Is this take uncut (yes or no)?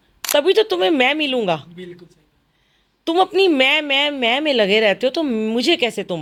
yes